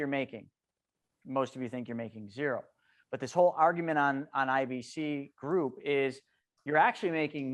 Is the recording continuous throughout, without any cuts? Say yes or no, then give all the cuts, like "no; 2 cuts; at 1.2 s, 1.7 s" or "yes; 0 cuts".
yes; 0 cuts